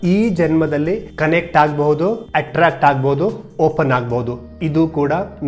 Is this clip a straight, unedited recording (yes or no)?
no